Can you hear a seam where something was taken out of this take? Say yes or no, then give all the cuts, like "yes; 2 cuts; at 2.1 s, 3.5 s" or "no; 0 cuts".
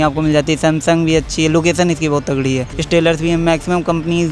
yes; 1 cut; at 2.7 s